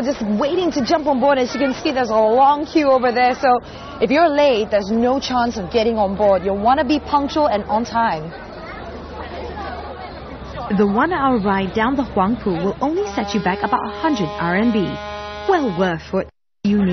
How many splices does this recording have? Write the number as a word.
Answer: one